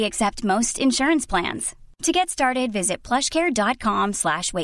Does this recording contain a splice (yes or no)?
no